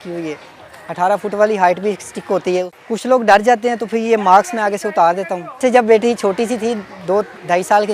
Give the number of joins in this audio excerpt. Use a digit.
2